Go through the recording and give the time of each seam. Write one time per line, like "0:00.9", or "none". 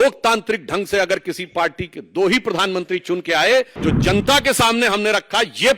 0:03.7